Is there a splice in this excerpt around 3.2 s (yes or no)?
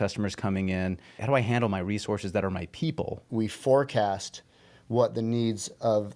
yes